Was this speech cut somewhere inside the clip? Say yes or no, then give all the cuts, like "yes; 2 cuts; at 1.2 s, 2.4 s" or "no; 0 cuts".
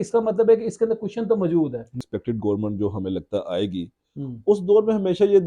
yes; 1 cut; at 2.0 s